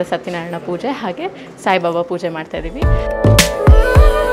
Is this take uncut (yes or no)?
no